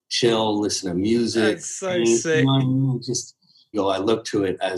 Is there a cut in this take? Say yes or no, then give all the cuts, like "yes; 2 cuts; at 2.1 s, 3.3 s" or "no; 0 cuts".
yes; 1 cut; at 3.7 s